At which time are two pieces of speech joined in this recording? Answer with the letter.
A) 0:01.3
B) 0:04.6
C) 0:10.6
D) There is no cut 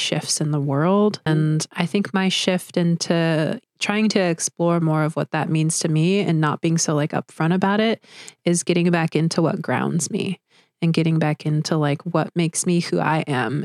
A